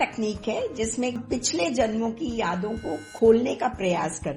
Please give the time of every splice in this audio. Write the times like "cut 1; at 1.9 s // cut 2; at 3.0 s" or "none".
cut 1; at 1.2 s